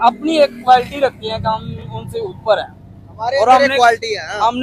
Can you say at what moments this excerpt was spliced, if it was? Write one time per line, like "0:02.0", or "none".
none